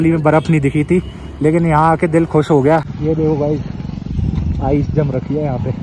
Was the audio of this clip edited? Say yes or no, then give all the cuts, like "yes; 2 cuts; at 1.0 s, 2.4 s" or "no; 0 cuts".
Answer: yes; 1 cut; at 2.9 s